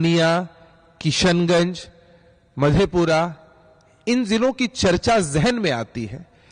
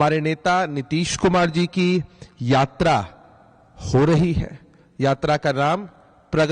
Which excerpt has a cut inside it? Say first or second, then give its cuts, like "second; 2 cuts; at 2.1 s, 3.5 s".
second; 1 cut; at 1.1 s